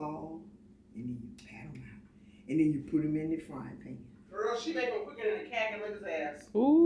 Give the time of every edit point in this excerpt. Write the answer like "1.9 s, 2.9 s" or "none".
2.0 s